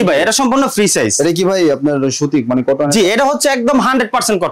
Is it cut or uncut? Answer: uncut